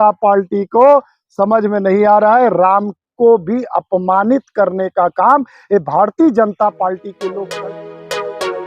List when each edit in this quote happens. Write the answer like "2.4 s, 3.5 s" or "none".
7.4 s